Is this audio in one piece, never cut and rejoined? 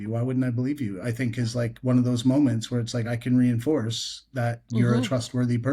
yes; 0 cuts

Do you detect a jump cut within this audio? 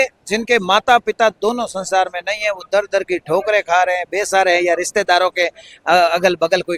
no; 0 cuts

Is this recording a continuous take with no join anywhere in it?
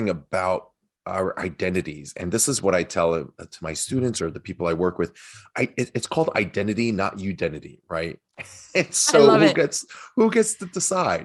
yes; 0 cuts

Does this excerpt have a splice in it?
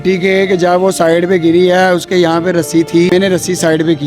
yes; 1 cut; at 3.1 s

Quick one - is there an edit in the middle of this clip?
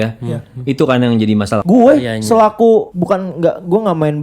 yes; 2 cuts; at 1.6 s, 2.9 s

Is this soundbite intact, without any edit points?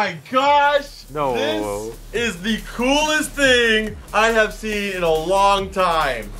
no; 2 cuts; at 1.0 s, 2.0 s

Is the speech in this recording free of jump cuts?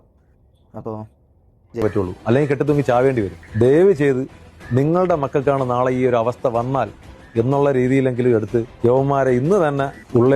no; 1 cut; at 1.8 s

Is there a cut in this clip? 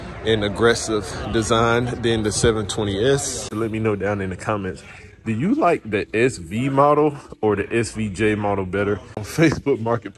yes; 2 cuts; at 3.5 s, 9.2 s

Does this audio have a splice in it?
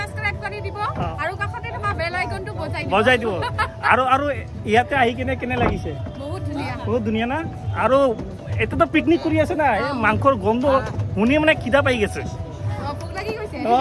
no; 0 cuts

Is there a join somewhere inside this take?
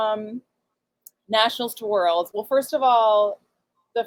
no; 0 cuts

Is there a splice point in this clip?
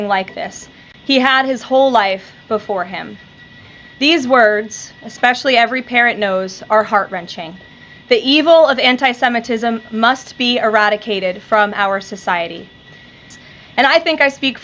yes; 1 cut; at 13.2 s

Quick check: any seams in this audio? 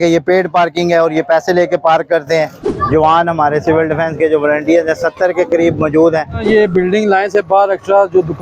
yes; 2 cuts; at 2.6 s, 6.4 s

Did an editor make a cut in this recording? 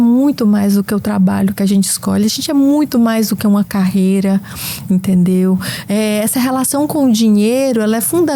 no; 0 cuts

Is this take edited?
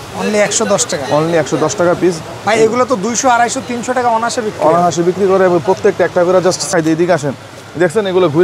yes; 1 cut; at 6.7 s

